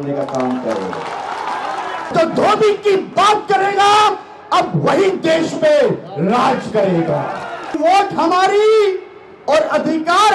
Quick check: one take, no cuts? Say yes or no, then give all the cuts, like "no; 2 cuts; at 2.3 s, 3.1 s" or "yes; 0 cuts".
no; 2 cuts; at 2.1 s, 7.8 s